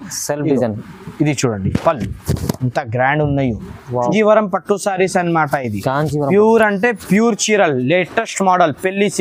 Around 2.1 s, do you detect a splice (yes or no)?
no